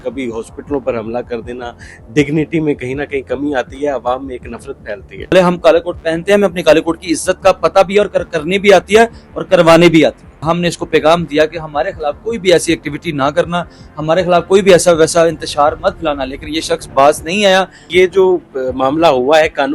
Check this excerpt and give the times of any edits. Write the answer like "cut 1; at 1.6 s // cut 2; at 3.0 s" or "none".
cut 1; at 5.3 s // cut 2; at 10.4 s // cut 3; at 17.8 s

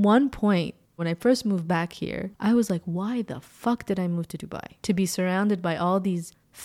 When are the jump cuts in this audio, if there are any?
cut 1; at 1.0 s // cut 2; at 4.8 s

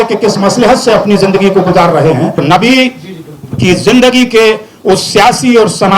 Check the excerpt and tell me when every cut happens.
cut 1; at 2.4 s

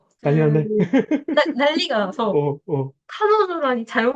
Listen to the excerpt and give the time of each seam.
none

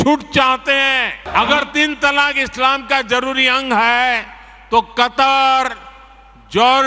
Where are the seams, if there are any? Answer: cut 1; at 1.2 s

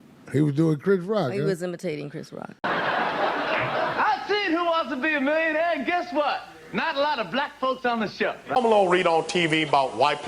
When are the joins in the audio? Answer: cut 1; at 2.5 s // cut 2; at 8.5 s

